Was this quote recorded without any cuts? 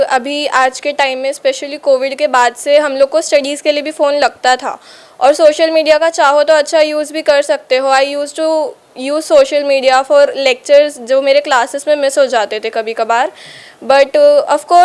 yes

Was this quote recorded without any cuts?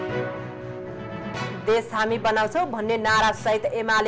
no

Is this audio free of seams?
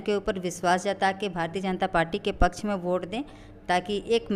yes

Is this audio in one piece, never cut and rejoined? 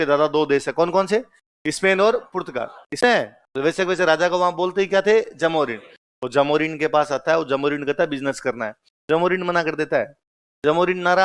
no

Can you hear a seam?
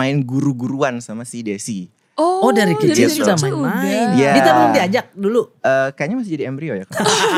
no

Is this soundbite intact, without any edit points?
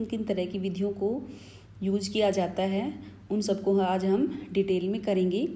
yes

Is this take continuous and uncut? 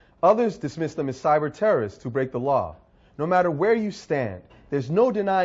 yes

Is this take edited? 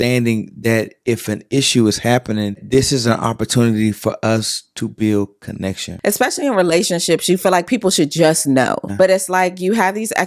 yes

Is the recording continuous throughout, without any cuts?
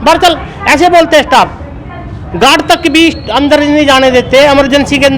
yes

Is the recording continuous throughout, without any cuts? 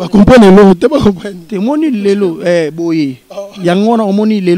yes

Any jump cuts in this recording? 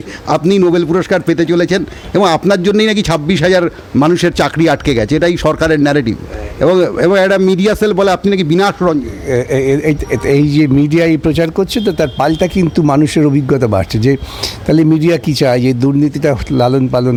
no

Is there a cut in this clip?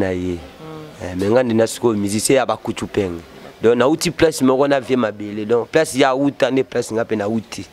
no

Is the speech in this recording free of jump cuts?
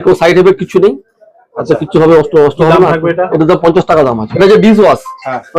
no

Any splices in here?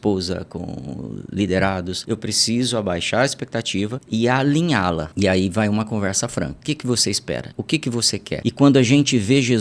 yes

